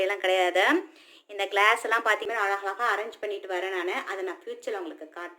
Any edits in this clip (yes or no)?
yes